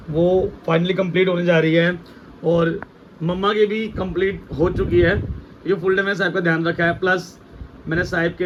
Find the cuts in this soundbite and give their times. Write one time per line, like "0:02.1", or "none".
none